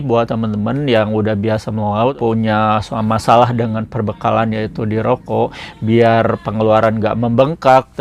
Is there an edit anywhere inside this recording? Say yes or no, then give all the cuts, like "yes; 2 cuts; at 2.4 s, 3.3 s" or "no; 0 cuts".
yes; 1 cut; at 2.1 s